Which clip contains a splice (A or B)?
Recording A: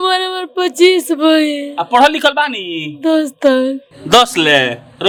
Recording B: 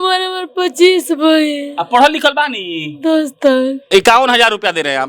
B